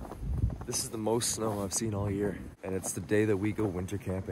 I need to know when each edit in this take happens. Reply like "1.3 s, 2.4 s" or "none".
2.5 s

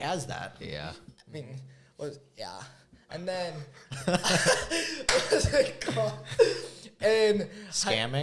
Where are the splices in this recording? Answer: none

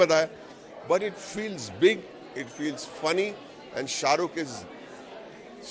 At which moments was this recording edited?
none

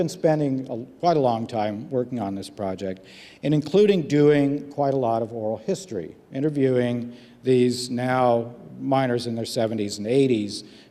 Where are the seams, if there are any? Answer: none

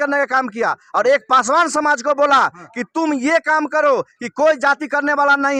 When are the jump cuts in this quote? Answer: none

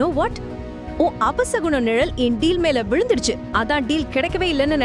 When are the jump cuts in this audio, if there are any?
none

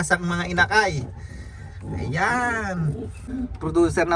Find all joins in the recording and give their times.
3.2 s

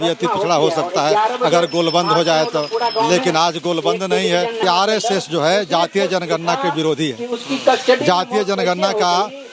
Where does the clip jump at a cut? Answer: 4.6 s

